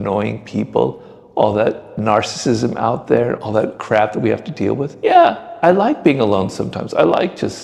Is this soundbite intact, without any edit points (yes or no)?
yes